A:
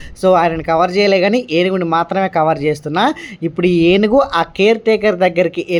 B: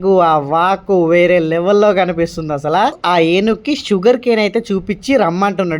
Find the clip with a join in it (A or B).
B